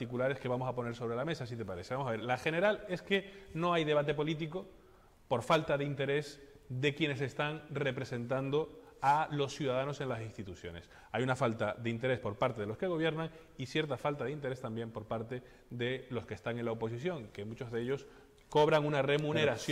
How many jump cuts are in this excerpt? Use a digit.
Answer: 0